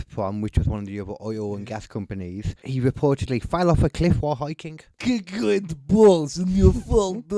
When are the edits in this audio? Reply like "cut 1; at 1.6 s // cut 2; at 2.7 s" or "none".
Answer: cut 1; at 2.6 s // cut 2; at 4.9 s